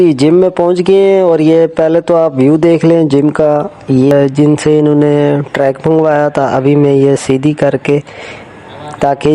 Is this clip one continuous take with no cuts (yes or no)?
no